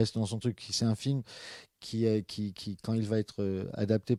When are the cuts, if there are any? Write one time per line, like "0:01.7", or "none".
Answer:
none